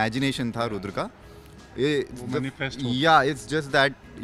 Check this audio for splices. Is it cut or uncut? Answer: uncut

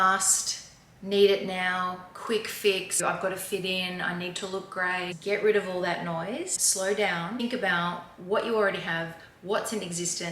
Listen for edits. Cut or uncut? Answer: cut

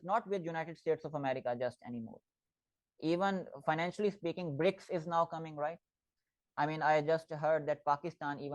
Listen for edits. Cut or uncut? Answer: uncut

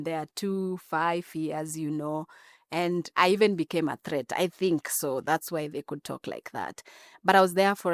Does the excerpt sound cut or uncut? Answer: uncut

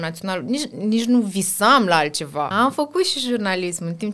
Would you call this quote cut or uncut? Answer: cut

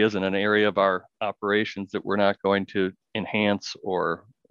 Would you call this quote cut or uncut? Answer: uncut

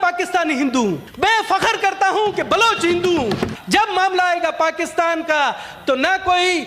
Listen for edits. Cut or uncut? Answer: cut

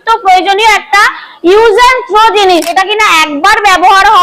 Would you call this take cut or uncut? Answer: cut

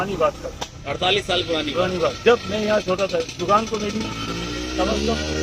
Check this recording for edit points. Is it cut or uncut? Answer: uncut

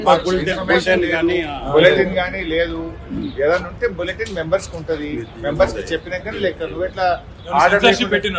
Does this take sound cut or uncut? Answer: uncut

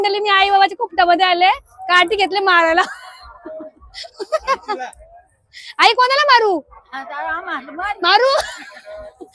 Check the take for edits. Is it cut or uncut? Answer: uncut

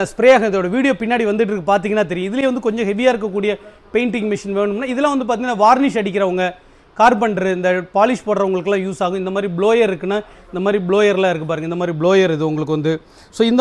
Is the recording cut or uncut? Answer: uncut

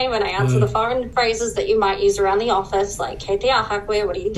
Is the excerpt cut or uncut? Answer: cut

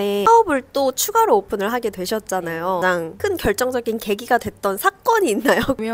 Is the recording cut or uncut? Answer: uncut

